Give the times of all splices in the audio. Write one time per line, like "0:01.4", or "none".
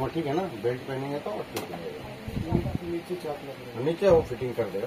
none